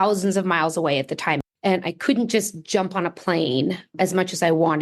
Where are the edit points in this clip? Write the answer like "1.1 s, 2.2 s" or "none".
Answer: 1.5 s, 3.9 s